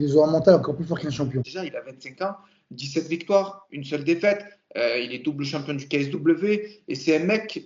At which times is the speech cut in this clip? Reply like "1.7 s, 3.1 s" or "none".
1.5 s